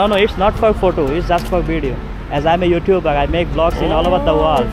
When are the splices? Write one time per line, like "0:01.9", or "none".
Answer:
none